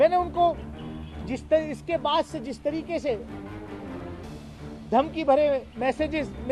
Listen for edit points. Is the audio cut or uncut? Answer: uncut